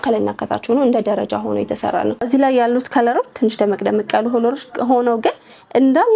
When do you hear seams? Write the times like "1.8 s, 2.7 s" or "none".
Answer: none